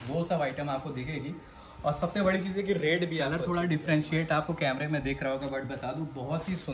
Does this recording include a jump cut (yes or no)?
yes